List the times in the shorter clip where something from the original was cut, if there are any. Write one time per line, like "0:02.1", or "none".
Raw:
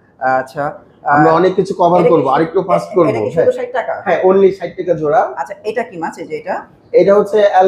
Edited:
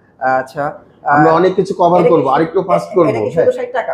none